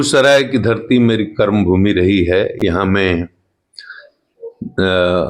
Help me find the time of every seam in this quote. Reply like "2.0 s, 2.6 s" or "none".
none